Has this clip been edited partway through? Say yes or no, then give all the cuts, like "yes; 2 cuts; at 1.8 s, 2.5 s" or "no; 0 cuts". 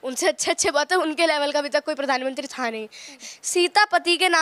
yes; 1 cut; at 3.1 s